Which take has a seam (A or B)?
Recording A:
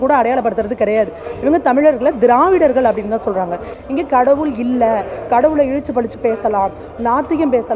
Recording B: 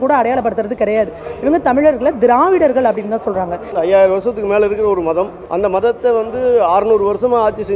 B